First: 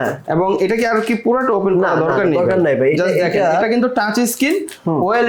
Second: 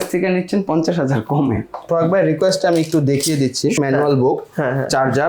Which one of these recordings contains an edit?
second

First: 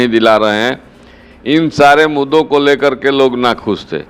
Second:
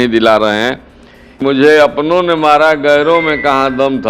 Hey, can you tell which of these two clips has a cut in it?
second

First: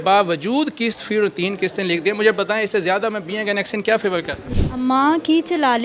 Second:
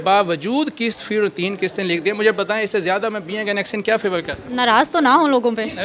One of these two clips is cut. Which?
first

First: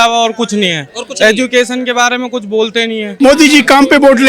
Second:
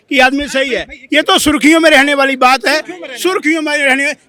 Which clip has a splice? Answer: first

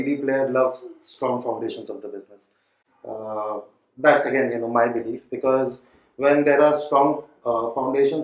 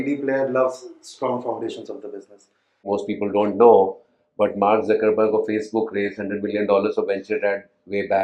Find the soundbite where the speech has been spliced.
second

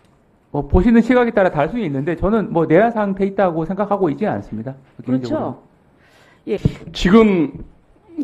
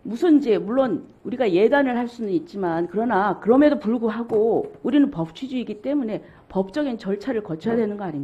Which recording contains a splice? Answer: first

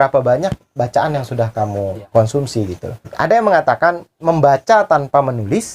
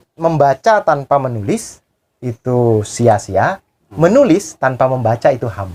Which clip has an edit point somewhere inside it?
first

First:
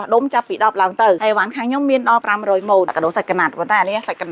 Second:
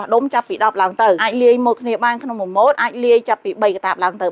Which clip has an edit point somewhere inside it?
first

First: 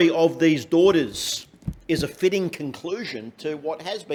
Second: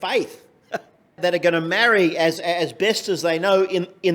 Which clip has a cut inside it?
second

